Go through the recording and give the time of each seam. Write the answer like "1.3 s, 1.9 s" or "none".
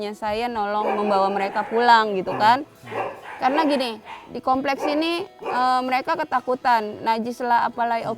none